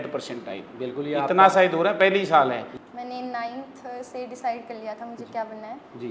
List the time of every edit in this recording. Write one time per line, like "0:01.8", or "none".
0:02.7